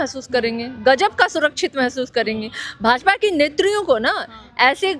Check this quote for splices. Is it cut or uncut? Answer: uncut